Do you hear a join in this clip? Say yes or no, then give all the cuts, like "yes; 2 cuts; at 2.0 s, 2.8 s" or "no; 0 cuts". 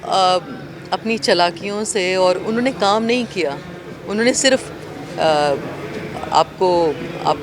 no; 0 cuts